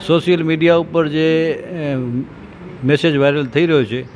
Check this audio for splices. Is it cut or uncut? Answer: uncut